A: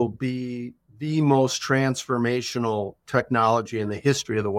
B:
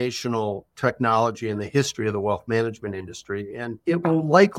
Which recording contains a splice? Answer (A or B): B